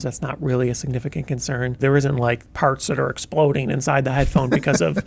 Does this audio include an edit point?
yes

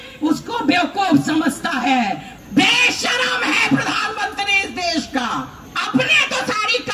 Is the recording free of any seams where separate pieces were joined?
no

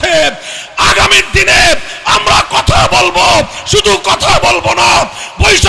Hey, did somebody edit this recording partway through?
no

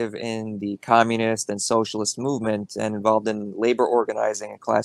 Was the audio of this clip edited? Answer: no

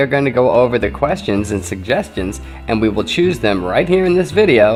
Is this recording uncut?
yes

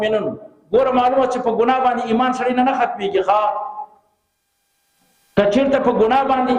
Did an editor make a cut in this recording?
no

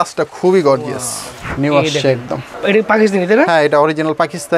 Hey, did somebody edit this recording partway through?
yes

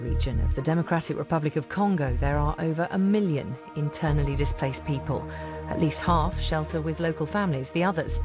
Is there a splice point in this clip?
no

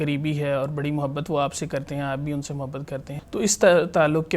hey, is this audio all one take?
no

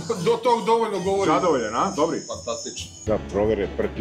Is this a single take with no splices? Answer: no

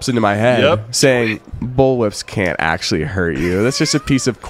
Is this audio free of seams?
yes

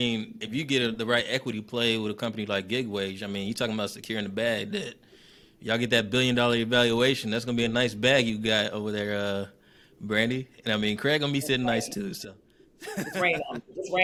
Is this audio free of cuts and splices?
yes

